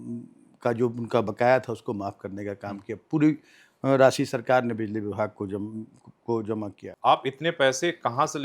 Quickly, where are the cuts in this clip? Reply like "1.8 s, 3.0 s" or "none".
6.8 s